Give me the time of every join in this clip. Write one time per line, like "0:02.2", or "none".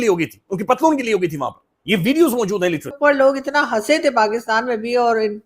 0:02.9